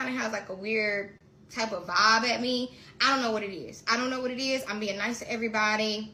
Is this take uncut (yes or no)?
yes